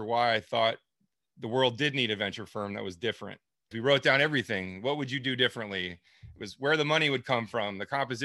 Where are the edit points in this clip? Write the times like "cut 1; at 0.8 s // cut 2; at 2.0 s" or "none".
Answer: cut 1; at 3.7 s